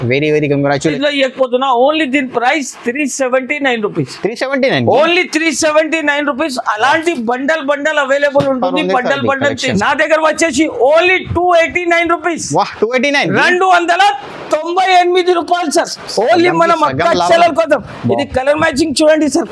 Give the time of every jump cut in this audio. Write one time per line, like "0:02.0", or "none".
0:00.9
0:09.7